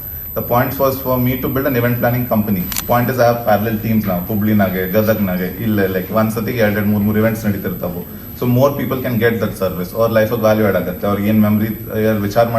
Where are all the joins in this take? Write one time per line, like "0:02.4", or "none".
0:02.7